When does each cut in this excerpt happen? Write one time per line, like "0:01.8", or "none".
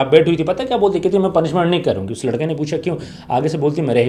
none